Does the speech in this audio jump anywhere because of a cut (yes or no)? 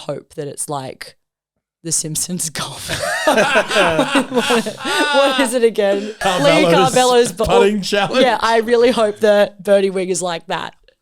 yes